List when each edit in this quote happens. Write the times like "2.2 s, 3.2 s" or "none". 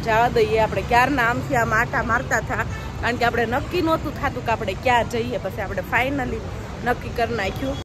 none